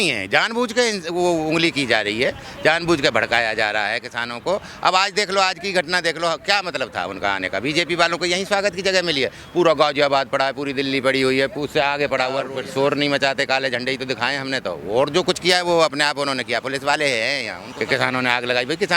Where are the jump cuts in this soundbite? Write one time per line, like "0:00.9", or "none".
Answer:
0:12.5
0:17.6